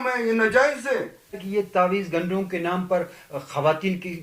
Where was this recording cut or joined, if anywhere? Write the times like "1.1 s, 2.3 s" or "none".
1.4 s